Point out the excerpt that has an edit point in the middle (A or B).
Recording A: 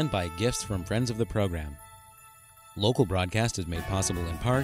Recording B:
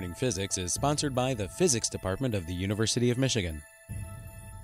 B